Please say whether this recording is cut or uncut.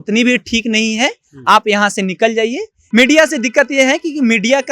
cut